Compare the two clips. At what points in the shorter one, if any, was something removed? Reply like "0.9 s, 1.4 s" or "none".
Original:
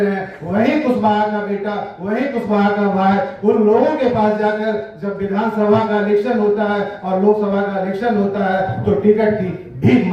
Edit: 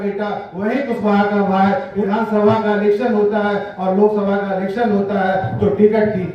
1.9 s